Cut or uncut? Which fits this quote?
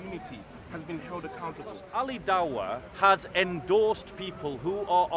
cut